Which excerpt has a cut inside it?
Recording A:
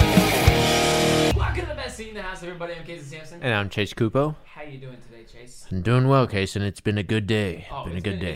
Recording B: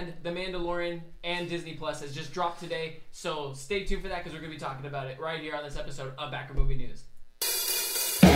A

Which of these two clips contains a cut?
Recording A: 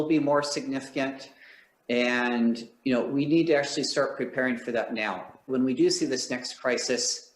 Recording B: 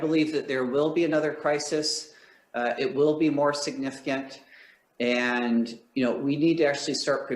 A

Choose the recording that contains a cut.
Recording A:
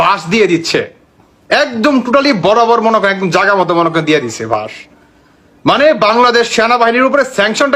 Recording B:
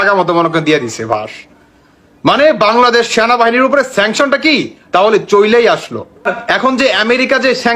B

